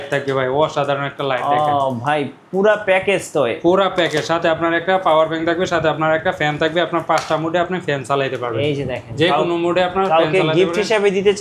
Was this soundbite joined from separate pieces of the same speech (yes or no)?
no